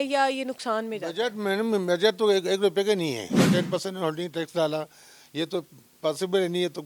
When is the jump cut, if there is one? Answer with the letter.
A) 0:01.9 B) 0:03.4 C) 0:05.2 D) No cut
B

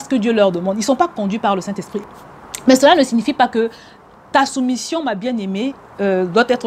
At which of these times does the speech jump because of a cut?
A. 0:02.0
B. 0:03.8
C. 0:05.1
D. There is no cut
A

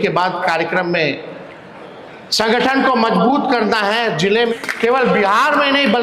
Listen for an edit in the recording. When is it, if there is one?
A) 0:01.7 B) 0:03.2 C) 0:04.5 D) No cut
C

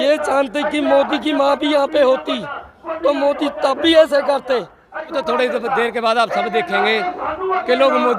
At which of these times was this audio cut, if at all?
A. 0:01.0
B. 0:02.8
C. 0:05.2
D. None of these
C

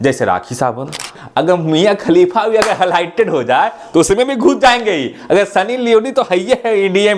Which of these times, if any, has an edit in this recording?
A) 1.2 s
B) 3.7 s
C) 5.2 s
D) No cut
A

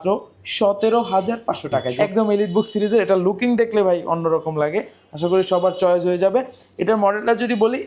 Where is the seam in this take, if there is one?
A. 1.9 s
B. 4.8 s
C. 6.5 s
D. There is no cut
A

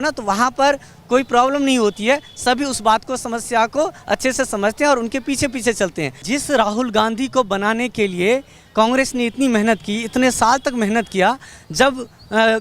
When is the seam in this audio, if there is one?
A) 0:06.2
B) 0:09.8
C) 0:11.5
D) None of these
A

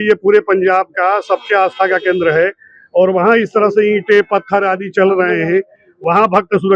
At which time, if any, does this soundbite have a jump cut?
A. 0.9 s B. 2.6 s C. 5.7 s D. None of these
D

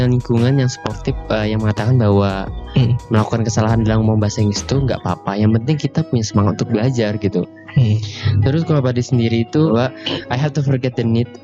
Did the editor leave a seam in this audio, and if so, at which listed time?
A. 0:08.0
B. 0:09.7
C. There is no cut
B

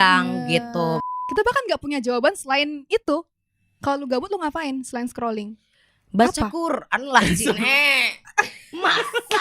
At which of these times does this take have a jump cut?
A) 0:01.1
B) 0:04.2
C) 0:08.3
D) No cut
A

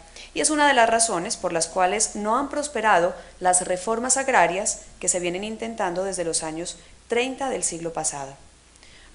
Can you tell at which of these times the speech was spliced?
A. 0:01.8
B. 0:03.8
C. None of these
B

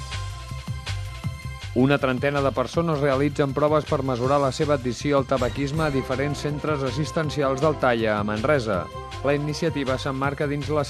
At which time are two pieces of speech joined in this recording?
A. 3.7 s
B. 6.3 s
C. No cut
A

